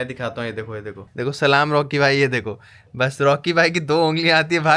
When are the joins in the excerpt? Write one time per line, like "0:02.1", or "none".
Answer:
0:01.1